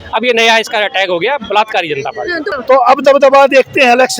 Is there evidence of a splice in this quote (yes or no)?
yes